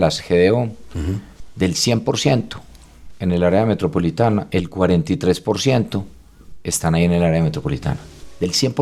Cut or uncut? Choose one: uncut